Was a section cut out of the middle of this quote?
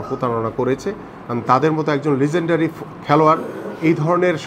no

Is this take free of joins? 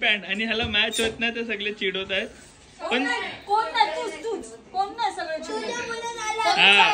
yes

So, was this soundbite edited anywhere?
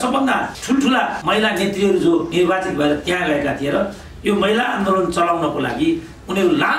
yes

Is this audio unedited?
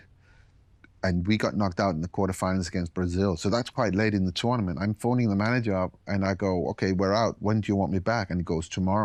yes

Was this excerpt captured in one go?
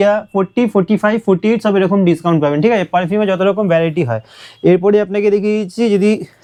yes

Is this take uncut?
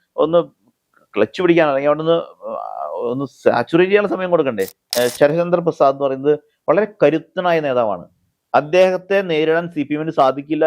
no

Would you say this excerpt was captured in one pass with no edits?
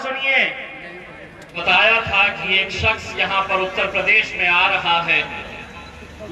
no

